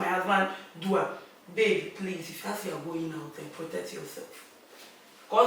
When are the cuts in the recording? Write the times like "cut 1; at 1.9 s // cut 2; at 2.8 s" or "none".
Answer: none